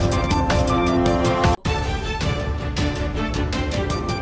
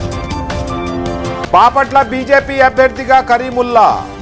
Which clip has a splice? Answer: second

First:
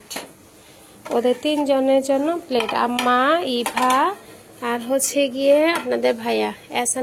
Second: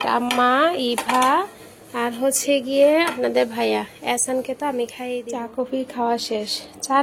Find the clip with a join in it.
second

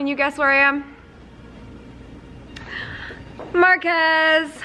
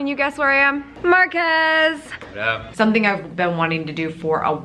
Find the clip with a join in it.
second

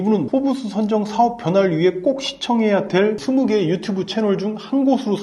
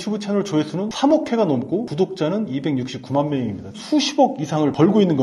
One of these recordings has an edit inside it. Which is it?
second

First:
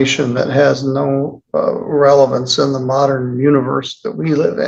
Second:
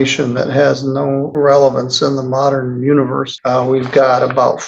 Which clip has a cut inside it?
second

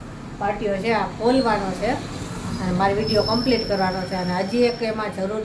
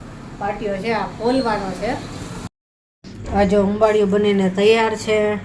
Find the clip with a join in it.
second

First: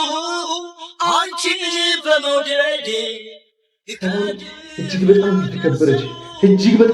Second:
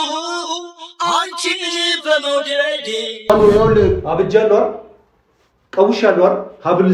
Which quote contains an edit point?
second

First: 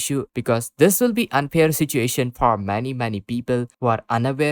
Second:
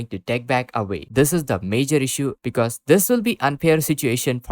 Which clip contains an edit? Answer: second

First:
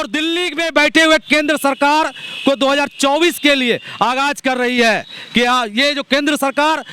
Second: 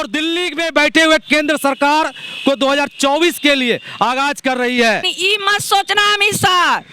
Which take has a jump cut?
second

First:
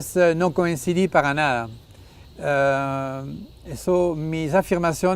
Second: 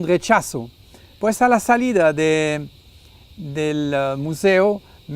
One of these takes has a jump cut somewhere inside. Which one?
second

